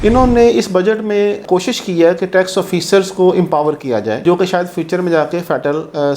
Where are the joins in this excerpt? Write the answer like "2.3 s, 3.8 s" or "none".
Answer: 1.4 s, 4.2 s